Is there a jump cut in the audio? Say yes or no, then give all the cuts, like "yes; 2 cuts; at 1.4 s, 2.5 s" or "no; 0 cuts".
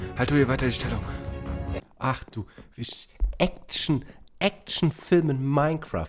yes; 1 cut; at 1.8 s